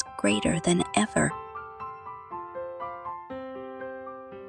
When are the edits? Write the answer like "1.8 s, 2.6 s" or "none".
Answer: 2.0 s